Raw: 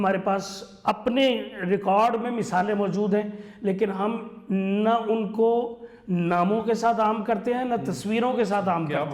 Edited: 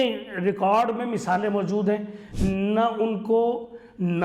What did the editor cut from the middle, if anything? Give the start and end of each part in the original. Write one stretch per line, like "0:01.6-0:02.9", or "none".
0:03.5-0:04.3